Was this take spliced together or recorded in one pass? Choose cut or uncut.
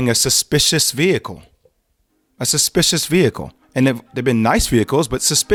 uncut